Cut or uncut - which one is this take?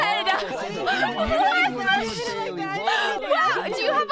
uncut